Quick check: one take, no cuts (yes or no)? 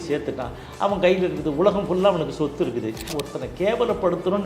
no